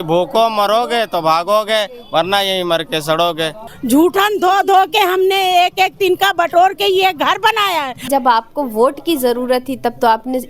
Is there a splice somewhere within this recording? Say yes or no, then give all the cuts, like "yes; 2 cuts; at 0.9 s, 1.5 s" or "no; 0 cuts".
yes; 2 cuts; at 3.7 s, 8.1 s